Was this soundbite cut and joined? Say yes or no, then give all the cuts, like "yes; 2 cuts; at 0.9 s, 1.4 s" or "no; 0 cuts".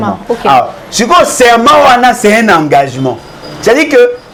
no; 0 cuts